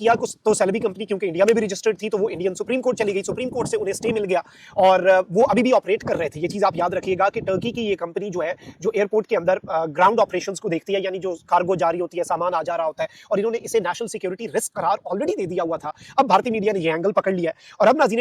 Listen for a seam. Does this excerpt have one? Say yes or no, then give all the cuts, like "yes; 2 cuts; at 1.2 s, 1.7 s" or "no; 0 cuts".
no; 0 cuts